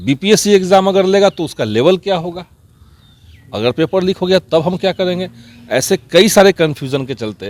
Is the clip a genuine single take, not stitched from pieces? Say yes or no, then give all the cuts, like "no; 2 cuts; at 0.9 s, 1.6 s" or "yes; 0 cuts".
yes; 0 cuts